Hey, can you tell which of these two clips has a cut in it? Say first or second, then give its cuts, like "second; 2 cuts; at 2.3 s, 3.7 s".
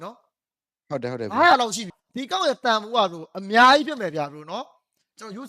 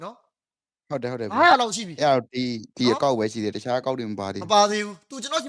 first; 1 cut; at 1.9 s